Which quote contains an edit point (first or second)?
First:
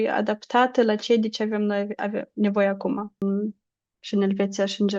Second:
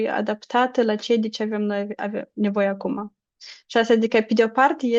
first